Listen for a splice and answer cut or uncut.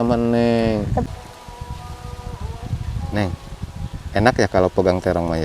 cut